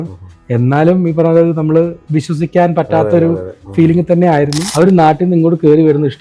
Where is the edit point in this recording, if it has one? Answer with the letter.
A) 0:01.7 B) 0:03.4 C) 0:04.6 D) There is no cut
C